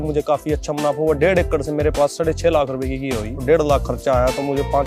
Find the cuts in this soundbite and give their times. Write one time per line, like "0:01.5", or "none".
0:03.4